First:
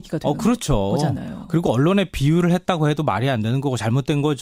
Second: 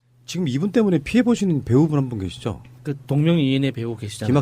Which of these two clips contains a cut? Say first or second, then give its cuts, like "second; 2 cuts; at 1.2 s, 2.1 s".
second; 1 cut; at 3.0 s